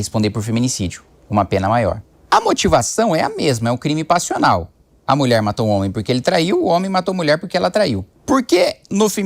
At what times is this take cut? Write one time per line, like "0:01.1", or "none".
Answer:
0:02.1
0:08.1